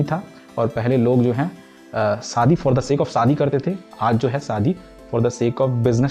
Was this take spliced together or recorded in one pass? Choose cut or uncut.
uncut